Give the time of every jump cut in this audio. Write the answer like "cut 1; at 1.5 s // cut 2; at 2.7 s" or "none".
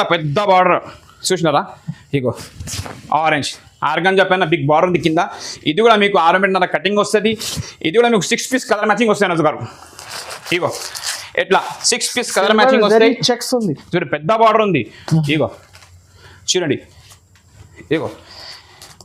none

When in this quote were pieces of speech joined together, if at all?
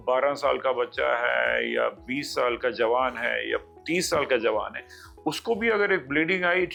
none

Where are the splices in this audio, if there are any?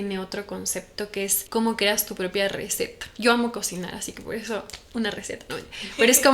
cut 1; at 1.4 s

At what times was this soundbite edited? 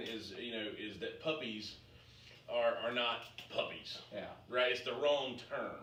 none

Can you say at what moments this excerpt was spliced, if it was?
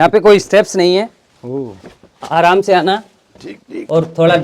none

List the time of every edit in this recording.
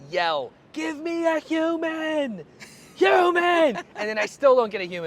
none

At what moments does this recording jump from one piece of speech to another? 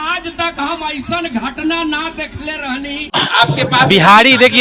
cut 1; at 3.1 s

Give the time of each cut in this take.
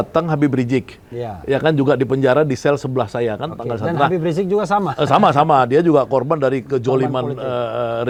none

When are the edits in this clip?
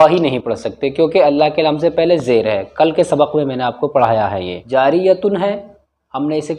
cut 1; at 4.5 s

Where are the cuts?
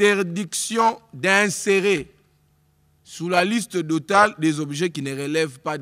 none

